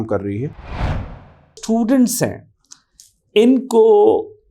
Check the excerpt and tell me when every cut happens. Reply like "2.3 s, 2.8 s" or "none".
1.2 s